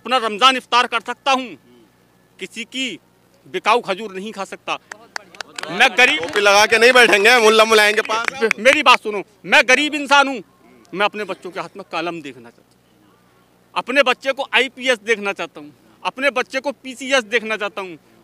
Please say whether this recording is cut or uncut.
uncut